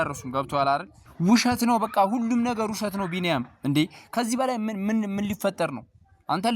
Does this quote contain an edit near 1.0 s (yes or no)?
yes